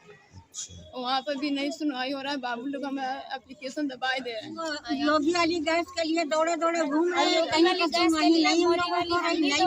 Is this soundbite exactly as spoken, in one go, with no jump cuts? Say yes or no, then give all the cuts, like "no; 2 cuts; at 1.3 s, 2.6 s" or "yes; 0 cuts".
no; 1 cut; at 4.7 s